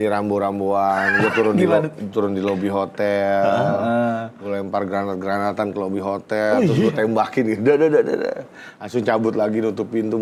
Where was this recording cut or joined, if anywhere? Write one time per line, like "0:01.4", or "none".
none